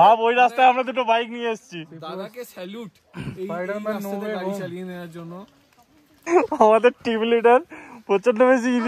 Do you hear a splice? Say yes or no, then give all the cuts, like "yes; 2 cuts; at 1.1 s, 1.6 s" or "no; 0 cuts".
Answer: yes; 1 cut; at 6.2 s